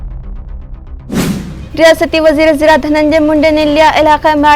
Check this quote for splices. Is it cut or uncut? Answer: cut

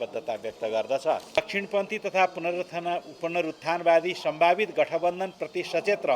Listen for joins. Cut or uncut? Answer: cut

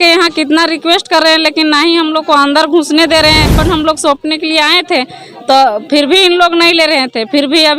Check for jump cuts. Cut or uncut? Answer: cut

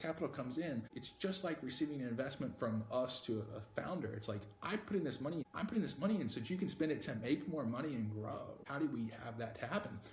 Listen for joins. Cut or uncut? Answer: cut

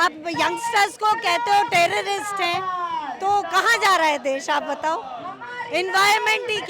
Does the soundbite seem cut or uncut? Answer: uncut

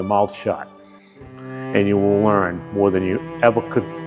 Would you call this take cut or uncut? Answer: uncut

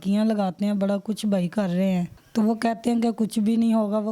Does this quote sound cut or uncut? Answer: cut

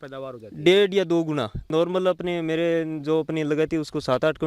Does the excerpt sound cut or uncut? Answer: cut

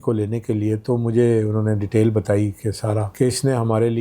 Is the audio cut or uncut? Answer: cut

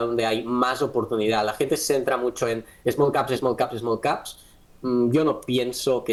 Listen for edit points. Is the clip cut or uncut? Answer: uncut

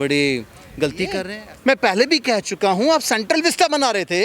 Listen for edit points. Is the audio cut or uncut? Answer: cut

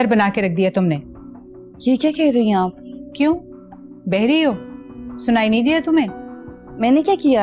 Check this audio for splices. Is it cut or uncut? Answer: uncut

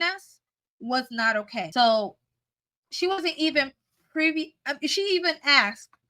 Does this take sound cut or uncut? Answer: cut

